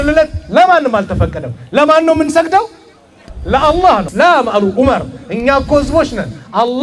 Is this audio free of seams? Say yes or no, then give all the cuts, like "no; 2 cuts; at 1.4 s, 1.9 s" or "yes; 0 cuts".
no; 1 cut; at 4.1 s